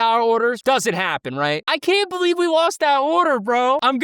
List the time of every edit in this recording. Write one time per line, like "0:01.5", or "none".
0:01.7